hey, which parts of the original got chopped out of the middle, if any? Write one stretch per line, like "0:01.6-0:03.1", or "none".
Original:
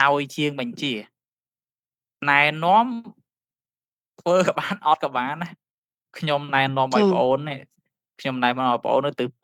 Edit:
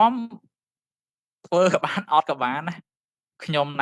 none